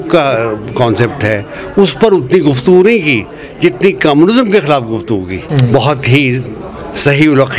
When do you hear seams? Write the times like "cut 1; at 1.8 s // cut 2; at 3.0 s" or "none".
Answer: cut 1; at 5.4 s